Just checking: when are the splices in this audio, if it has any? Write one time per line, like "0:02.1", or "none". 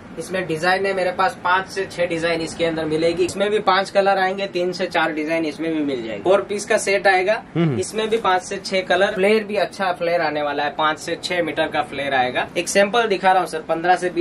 0:03.3
0:06.1
0:09.1
0:12.5